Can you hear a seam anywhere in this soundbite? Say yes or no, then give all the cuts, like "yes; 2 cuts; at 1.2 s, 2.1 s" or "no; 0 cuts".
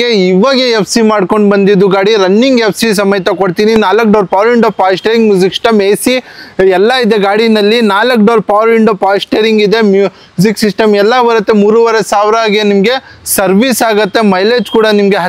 no; 0 cuts